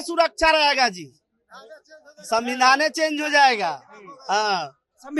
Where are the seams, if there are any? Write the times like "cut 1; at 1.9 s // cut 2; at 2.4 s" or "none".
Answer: none